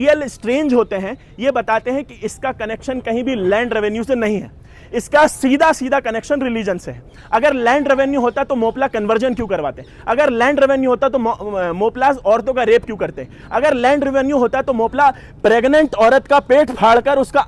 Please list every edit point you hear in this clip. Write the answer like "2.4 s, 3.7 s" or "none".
none

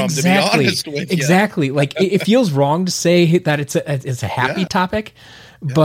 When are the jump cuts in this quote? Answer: 4.7 s

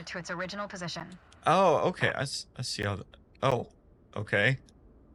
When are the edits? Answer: none

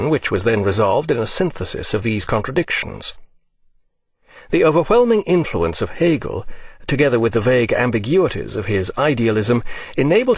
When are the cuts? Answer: 1.6 s

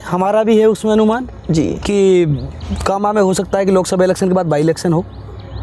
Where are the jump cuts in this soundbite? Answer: none

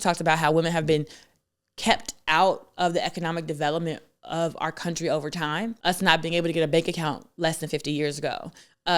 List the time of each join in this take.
5.8 s

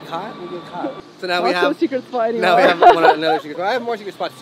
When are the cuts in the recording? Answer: 1.1 s

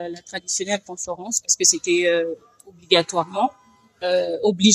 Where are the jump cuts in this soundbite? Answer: none

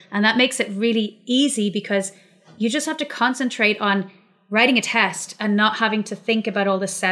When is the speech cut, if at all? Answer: none

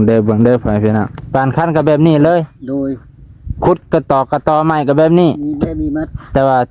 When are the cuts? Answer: 1.2 s

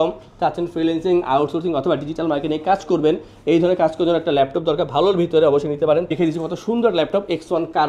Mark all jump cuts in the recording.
6.1 s

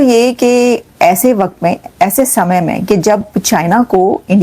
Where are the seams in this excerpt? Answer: none

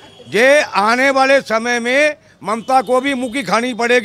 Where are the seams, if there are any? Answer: none

